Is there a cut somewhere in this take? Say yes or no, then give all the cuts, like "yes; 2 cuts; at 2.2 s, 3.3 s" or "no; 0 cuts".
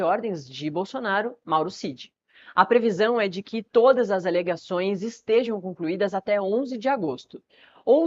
yes; 1 cut; at 1.4 s